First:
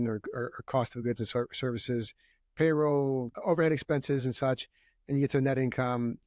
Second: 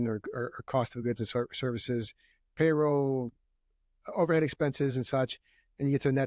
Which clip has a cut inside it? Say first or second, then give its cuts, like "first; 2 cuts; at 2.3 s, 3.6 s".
first; 1 cut; at 3.3 s